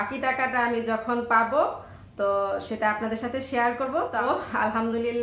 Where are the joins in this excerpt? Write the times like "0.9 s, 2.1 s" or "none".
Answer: 4.2 s